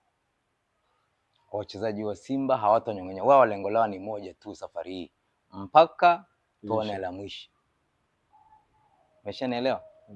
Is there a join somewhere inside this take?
no; 0 cuts

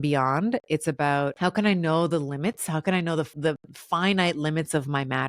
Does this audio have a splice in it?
yes; 2 cuts; at 1.3 s, 3.3 s

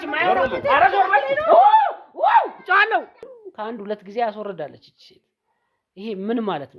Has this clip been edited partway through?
yes; 1 cut; at 3.4 s

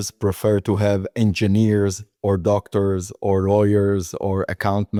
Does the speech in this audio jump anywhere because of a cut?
no; 0 cuts

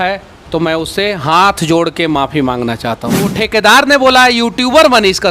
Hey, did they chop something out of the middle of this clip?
yes; 1 cut; at 3.3 s

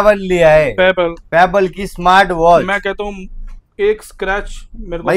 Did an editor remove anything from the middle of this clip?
no; 0 cuts

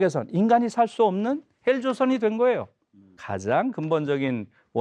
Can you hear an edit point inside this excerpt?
yes; 1 cut; at 3.2 s

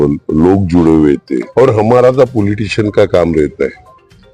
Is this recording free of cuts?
no; 1 cut; at 1.5 s

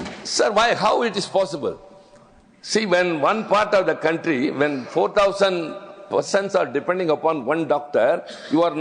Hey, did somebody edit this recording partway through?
no; 0 cuts

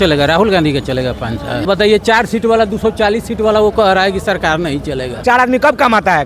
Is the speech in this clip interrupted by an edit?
yes; 2 cuts; at 1.6 s, 5.2 s

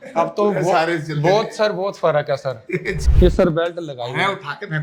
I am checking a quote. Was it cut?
yes; 1 cut; at 3.0 s

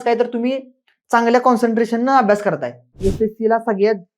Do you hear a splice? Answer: yes; 1 cut; at 3.0 s

